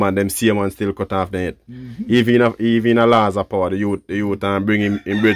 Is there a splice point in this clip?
no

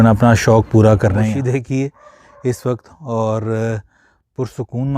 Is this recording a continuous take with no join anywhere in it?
no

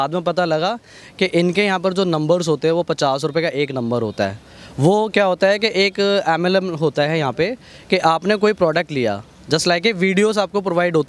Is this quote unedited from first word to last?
yes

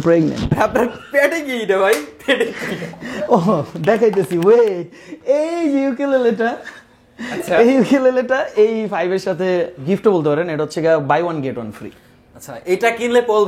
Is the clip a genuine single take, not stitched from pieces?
no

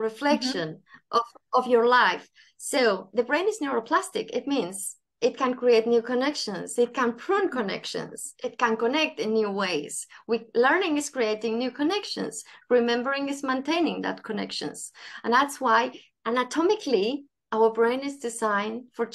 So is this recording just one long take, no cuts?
yes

